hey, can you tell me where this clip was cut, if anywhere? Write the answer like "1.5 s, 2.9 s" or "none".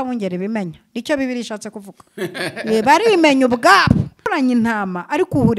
4.3 s